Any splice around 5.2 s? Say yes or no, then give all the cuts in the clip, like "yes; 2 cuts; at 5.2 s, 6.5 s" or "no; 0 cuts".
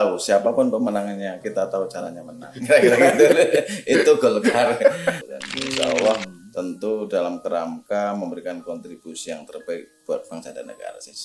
yes; 1 cut; at 5.2 s